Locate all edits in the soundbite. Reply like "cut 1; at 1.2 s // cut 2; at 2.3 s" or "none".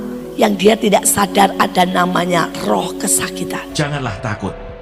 cut 1; at 3.7 s